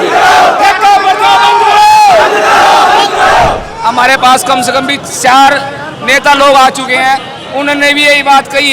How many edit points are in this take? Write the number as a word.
one